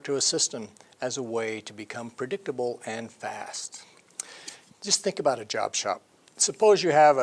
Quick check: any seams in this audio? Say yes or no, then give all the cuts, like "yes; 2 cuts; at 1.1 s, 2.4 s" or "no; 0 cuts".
yes; 1 cut; at 4.2 s